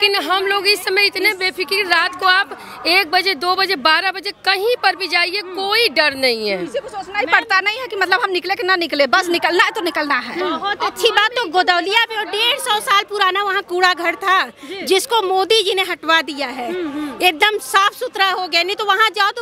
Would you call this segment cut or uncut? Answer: uncut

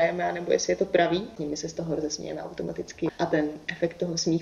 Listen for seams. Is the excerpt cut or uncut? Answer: cut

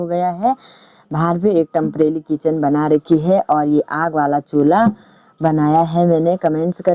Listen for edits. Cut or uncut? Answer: uncut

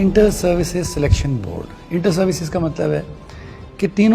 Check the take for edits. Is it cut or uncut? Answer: uncut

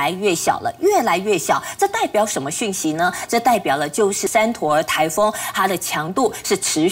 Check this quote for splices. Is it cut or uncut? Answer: cut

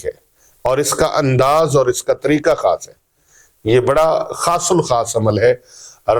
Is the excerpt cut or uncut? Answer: uncut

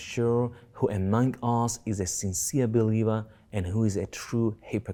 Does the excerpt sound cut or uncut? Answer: uncut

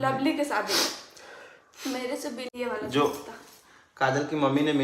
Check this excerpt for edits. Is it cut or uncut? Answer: cut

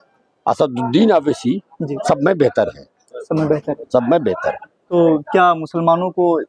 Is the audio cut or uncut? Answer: cut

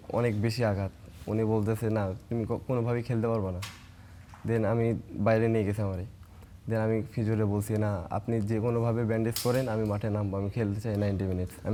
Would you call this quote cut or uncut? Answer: uncut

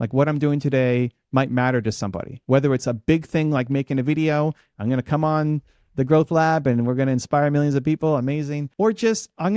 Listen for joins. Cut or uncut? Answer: cut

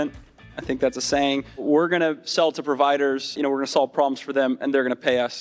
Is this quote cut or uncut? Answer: cut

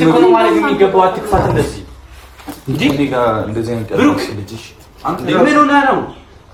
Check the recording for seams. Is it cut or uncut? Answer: uncut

